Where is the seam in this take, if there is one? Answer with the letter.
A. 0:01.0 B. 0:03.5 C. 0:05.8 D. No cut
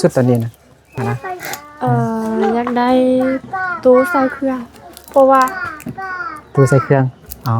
A